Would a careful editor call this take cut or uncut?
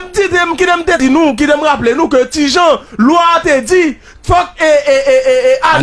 cut